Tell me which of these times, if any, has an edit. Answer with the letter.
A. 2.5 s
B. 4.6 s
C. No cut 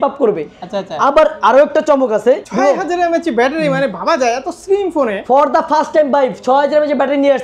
A